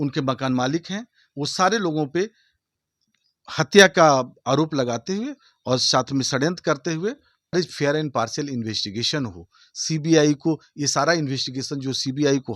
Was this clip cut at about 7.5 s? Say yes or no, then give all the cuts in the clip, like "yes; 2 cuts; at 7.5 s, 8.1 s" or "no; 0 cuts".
yes; 1 cut; at 7.5 s